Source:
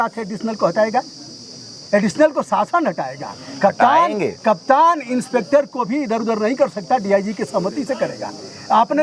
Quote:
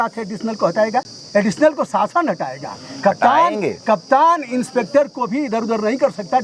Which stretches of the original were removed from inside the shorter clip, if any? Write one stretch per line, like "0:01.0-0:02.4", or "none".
0:01.2-0:01.8